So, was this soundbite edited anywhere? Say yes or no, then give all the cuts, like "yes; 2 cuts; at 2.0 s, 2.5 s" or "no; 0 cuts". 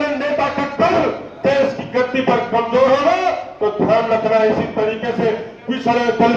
no; 0 cuts